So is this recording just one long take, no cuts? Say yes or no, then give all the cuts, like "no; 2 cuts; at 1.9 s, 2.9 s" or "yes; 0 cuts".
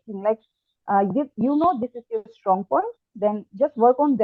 yes; 0 cuts